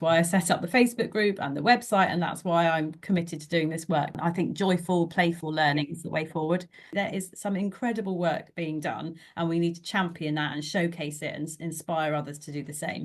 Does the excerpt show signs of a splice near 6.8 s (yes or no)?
yes